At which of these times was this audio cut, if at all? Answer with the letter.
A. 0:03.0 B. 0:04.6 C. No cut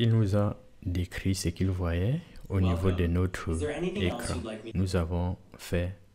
B